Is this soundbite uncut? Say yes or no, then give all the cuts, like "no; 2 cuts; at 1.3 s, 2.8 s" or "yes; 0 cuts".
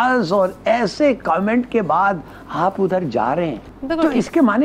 no; 1 cut; at 3.7 s